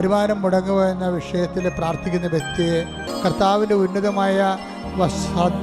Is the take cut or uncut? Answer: cut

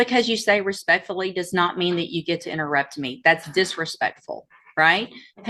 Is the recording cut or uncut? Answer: uncut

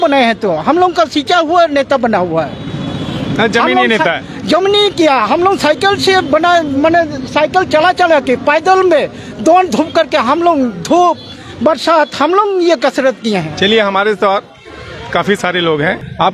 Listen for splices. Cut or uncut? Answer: uncut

